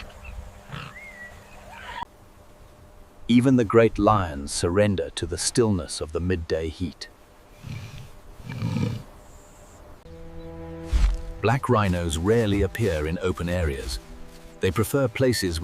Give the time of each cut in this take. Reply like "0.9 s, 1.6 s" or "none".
none